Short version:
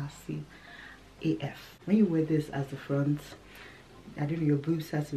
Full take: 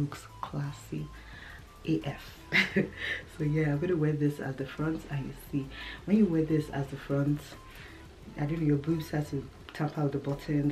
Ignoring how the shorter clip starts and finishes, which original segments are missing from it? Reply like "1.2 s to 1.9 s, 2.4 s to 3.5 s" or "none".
2.3 s to 5.9 s